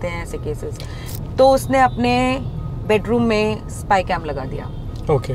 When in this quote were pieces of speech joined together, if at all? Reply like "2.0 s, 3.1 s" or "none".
1.0 s